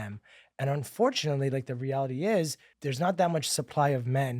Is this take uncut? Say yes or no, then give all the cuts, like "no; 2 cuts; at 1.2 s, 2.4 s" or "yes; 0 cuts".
no; 1 cut; at 2.7 s